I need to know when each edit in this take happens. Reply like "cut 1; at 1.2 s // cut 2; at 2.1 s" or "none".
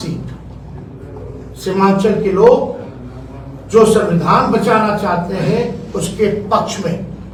none